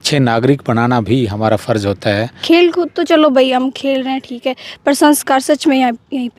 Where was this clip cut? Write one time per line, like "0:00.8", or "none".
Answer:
0:02.3